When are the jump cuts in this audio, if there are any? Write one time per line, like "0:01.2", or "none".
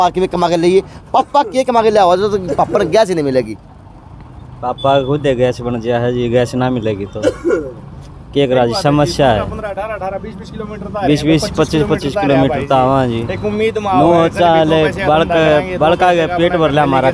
none